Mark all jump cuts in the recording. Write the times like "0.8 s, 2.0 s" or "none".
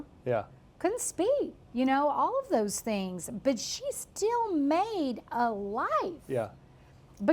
1.6 s